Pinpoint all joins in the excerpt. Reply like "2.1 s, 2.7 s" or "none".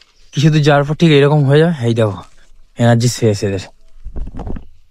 none